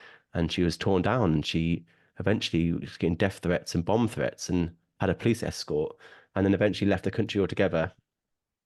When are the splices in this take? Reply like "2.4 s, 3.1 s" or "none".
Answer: none